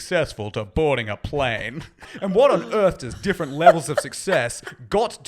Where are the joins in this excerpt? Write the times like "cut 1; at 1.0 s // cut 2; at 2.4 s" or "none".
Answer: cut 1; at 2.1 s

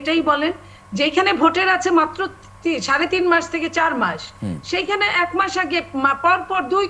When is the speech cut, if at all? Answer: none

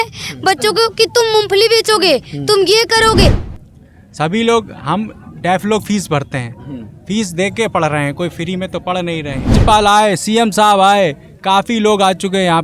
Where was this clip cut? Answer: cut 1; at 3.5 s // cut 2; at 9.6 s

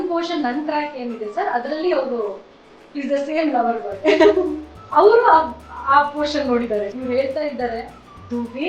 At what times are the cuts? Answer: cut 1; at 6.9 s

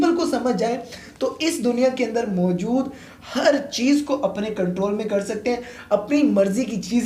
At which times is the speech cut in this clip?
none

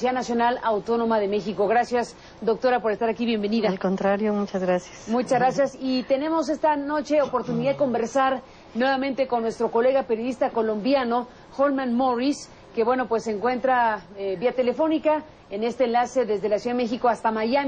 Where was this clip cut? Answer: cut 1; at 1.4 s

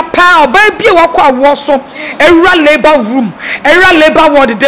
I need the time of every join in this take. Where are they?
none

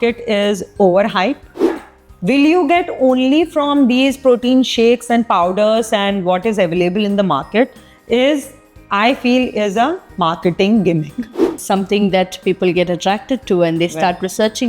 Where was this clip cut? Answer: cut 1; at 1.7 s // cut 2; at 11.6 s

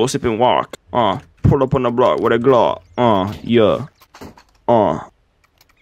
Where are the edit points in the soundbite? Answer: none

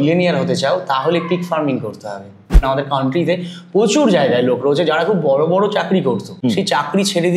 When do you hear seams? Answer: cut 1; at 2.6 s // cut 2; at 6.3 s

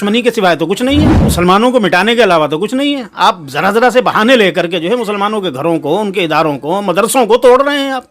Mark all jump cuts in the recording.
cut 1; at 1.2 s

